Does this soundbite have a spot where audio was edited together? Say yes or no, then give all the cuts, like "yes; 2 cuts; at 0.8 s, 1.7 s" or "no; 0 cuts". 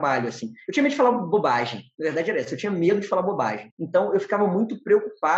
no; 0 cuts